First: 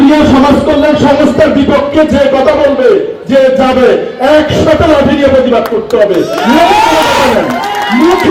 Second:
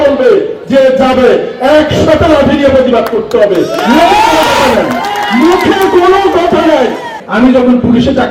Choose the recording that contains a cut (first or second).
second